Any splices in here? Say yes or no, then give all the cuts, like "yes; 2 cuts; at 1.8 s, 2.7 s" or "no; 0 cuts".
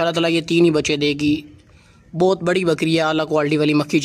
no; 0 cuts